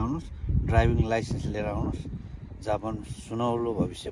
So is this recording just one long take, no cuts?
yes; 0 cuts

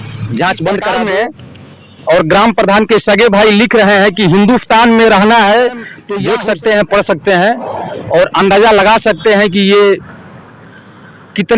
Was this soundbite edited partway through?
yes; 2 cuts; at 0.9 s, 6.0 s

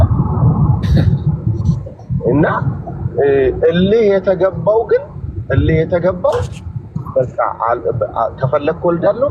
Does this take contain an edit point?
no; 0 cuts

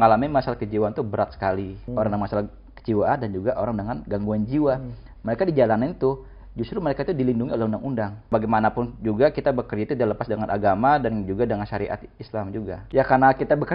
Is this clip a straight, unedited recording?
no; 3 cuts; at 1.8 s, 8.3 s, 12.8 s

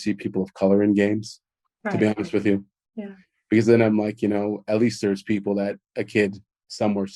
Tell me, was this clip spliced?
no; 0 cuts

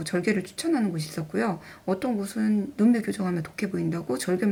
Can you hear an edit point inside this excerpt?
no; 0 cuts

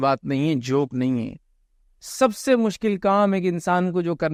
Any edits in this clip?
no; 0 cuts

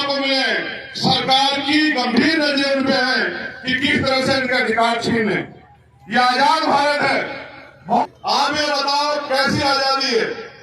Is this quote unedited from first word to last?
no; 1 cut; at 8.0 s

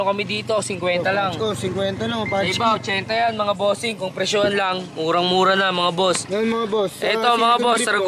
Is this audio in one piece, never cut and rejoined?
yes; 0 cuts

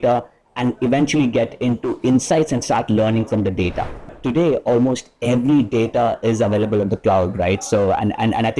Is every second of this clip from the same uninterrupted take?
no; 1 cut; at 4.1 s

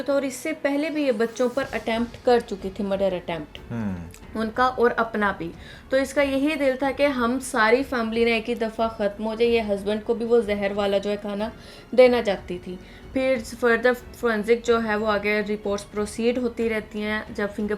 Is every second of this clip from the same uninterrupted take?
yes; 0 cuts

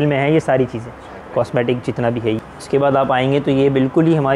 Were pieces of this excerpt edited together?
yes; 1 cut; at 2.4 s

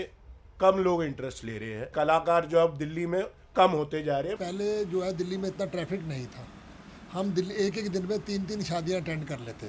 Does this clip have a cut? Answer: yes; 2 cuts; at 1.9 s, 4.4 s

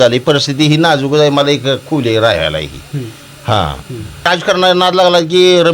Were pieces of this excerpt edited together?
yes; 1 cut; at 4.3 s

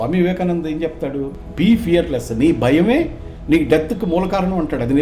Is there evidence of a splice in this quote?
yes; 1 cut; at 1.3 s

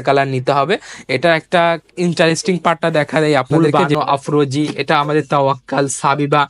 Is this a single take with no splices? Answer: no; 1 cut; at 3.5 s

